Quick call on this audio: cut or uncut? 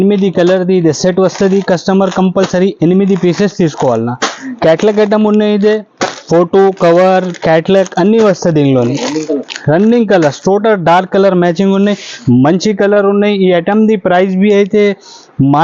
uncut